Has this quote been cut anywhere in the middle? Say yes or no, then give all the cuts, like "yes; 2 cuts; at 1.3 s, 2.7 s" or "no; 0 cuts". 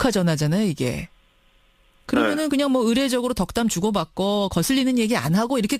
yes; 1 cut; at 3.5 s